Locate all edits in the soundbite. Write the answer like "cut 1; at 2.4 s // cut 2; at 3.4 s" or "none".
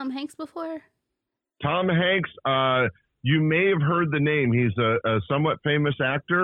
none